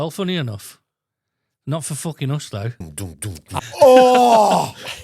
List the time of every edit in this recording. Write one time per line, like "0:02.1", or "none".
0:03.3

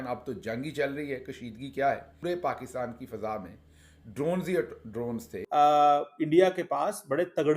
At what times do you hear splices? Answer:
0:02.1
0:05.3

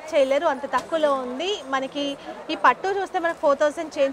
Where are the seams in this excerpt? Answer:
none

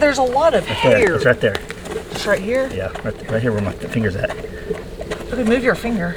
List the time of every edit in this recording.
none

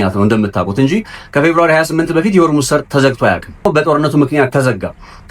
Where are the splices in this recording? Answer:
0:03.6

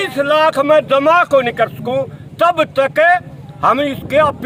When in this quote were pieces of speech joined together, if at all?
none

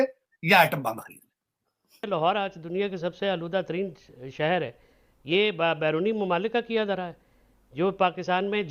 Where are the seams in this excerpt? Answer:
0:02.0

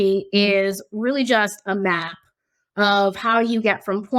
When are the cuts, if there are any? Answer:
none

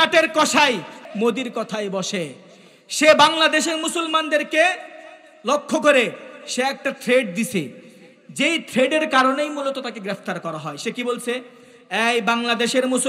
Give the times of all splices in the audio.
0:01.0

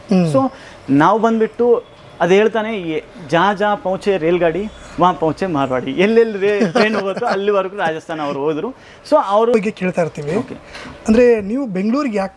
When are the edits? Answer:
0:09.5

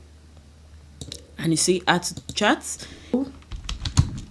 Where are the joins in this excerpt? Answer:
0:03.1

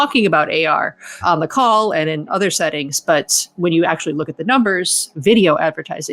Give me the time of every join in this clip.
0:05.1

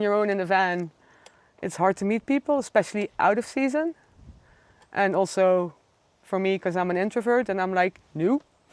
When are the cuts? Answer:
none

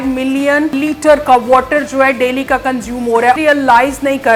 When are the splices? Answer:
0:00.7
0:03.4

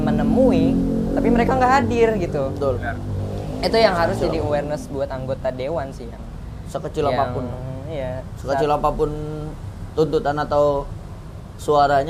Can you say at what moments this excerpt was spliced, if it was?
none

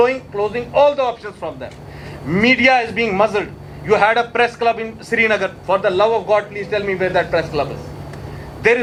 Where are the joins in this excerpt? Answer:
none

